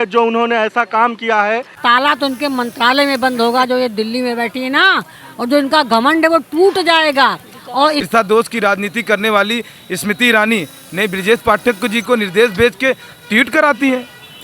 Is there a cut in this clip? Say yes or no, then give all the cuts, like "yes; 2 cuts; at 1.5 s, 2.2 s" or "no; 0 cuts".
yes; 2 cuts; at 1.8 s, 8.1 s